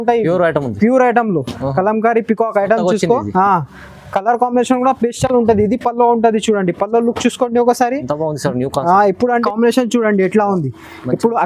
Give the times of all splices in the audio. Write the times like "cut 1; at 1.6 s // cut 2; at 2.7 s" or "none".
cut 1; at 9.4 s